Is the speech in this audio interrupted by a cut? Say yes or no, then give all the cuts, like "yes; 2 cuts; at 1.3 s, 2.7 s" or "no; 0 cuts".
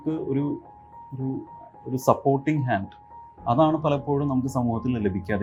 no; 0 cuts